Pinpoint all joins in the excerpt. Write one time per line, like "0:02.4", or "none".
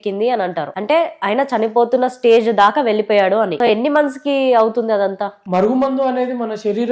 0:03.5
0:05.4

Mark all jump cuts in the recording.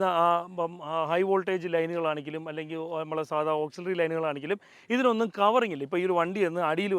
none

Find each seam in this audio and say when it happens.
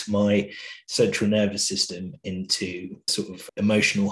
0:03.1

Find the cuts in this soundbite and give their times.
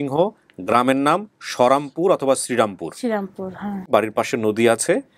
0:03.9

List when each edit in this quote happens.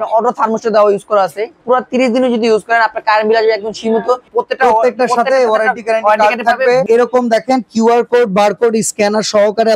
0:01.5
0:04.3
0:06.8

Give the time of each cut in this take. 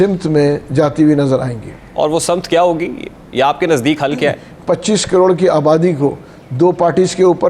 0:04.5

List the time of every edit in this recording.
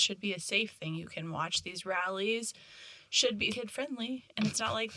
0:03.6

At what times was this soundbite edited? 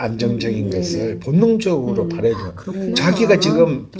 none

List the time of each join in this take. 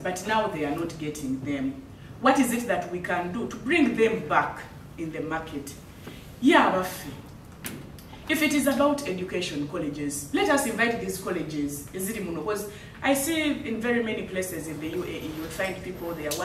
none

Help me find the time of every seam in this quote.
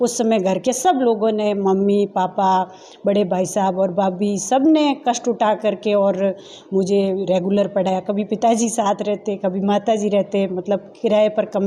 none

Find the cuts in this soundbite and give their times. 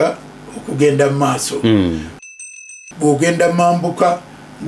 0:02.4

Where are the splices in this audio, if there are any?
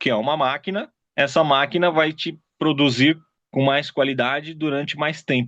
0:01.0
0:03.3

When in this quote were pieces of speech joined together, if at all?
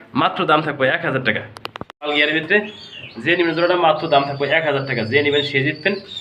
0:02.1

